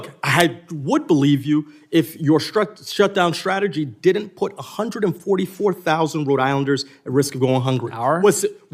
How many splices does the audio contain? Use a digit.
0